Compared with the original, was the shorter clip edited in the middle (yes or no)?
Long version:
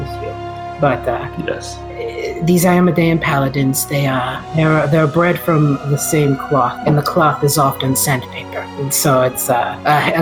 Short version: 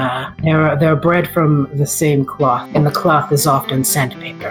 no